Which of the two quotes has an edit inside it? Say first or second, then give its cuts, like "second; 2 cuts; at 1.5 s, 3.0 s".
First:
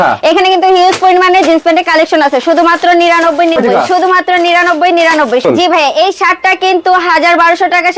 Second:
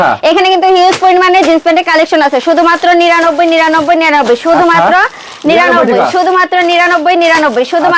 first; 2 cuts; at 3.6 s, 5.4 s